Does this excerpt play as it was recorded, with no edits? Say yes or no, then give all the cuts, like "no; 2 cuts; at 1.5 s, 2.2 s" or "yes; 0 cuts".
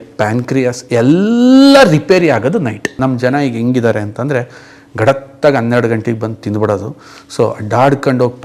no; 1 cut; at 2.9 s